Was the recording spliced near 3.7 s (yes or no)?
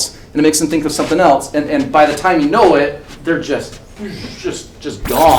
no